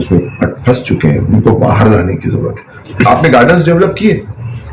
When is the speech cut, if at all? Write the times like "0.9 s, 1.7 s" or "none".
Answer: 2.9 s